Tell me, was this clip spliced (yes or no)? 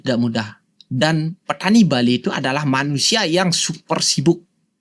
no